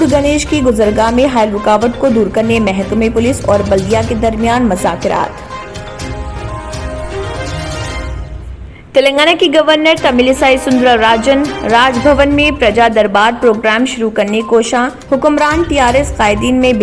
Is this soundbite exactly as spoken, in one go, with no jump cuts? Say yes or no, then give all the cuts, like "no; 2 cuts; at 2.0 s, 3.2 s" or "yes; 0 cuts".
yes; 0 cuts